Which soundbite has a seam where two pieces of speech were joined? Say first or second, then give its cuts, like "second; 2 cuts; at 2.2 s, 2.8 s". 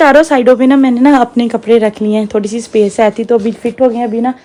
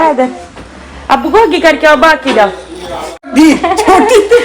second; 1 cut; at 3.1 s